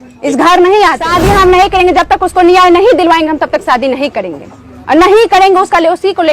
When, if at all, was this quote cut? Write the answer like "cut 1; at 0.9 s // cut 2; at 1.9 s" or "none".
cut 1; at 1.0 s